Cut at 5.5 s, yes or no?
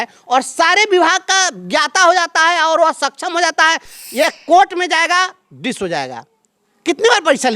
no